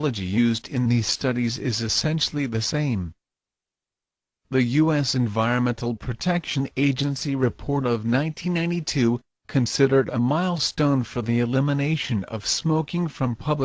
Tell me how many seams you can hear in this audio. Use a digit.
0